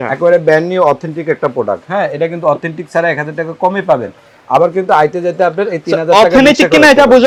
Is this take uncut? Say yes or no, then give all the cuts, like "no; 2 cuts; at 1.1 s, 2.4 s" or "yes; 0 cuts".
yes; 0 cuts